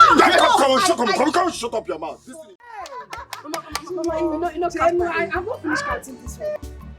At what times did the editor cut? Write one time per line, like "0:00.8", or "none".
0:02.1